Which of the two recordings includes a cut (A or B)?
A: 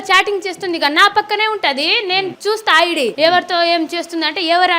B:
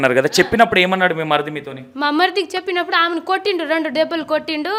A